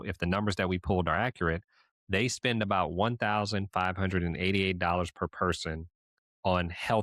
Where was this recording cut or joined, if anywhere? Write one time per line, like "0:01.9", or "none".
none